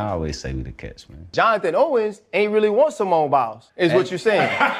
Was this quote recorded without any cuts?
no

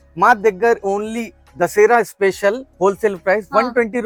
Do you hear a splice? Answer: no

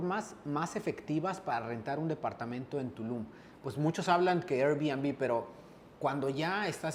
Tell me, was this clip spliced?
no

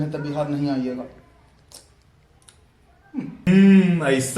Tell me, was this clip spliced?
yes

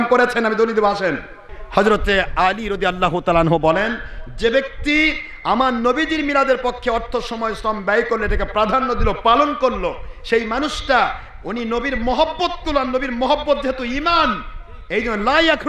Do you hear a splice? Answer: yes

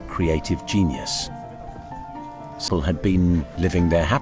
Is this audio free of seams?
no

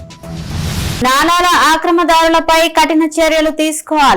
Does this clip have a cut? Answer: no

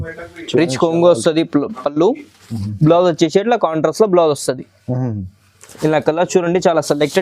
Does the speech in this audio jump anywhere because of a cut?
no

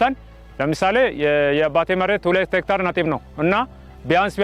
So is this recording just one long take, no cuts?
yes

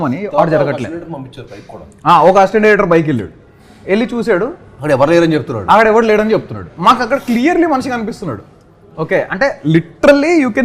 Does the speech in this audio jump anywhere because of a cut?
no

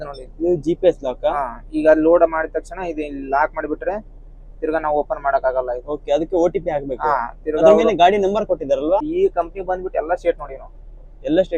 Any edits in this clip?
yes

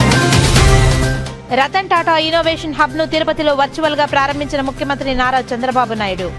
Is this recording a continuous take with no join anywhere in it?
no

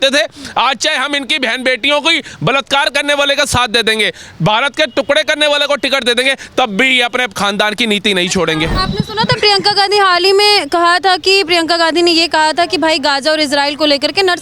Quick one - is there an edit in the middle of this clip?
yes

